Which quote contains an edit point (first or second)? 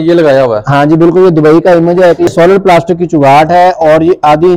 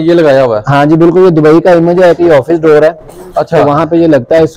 first